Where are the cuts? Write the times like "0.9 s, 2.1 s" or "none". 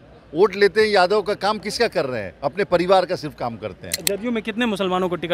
4.1 s